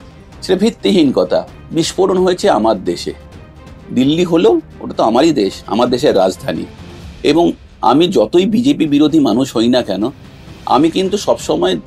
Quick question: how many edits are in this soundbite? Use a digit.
1